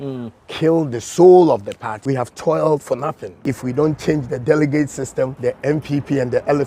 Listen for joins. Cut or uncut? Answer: cut